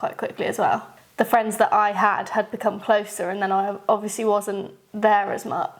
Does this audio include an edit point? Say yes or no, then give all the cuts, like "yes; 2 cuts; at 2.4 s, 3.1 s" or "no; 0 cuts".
yes; 1 cut; at 0.9 s